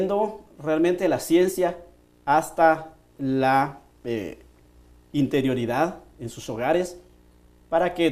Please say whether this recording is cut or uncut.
cut